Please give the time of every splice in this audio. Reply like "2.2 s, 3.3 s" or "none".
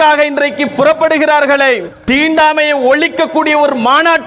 1.9 s

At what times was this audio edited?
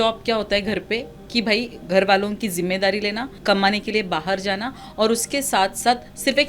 3.3 s

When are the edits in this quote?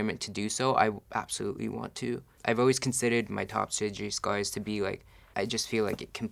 2.3 s, 5.1 s

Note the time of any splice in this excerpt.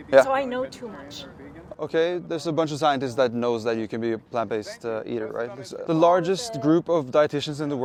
none

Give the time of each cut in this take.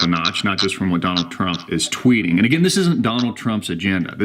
3.1 s

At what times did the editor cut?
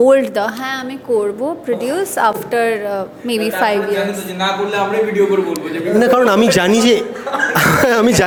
none

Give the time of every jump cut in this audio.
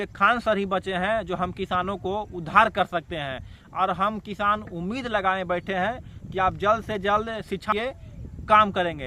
7.7 s

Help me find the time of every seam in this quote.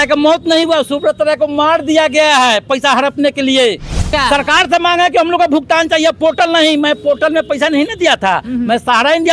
4.1 s

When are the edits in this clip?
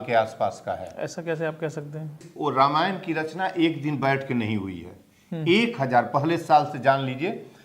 2.3 s

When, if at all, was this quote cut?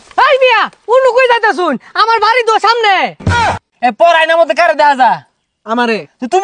3.2 s

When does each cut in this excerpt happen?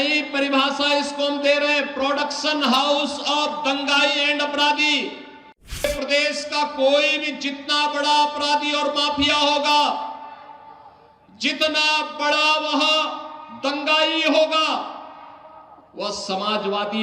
5.8 s

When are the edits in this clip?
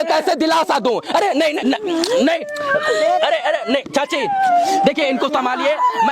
1.6 s

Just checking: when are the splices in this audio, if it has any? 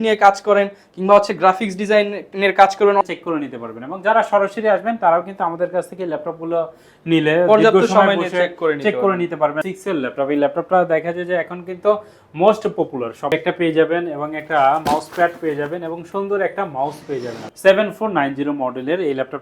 3.0 s, 9.6 s, 13.3 s, 17.4 s

